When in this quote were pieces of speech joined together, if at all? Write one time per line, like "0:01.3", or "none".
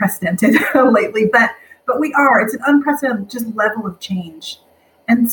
none